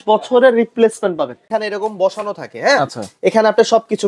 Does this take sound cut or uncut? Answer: cut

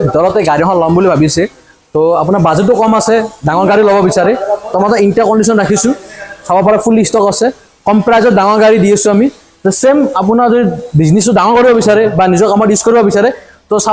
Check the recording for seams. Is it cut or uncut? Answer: uncut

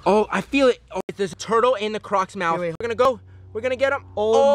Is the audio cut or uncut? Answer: cut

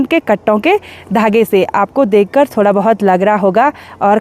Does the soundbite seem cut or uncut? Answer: uncut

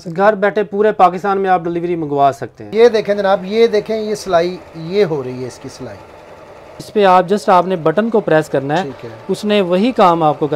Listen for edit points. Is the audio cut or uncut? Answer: cut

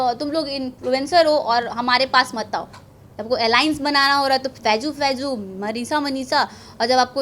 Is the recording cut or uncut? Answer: uncut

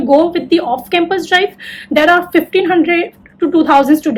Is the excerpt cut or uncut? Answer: uncut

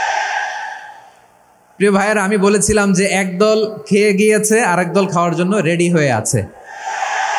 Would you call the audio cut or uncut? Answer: uncut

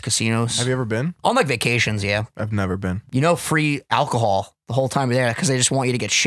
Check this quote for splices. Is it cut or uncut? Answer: cut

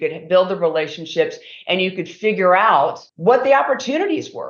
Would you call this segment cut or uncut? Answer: cut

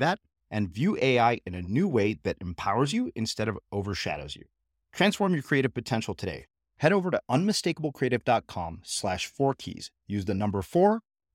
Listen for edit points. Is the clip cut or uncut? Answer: uncut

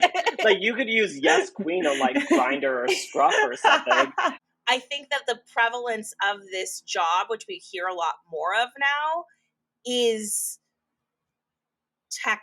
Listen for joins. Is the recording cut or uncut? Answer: cut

